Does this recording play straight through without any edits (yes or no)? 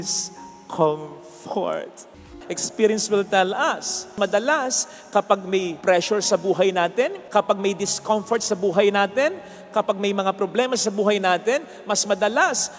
no